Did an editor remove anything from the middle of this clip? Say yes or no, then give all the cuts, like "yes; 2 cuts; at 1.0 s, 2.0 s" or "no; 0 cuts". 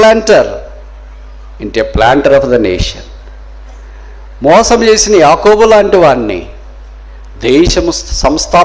no; 0 cuts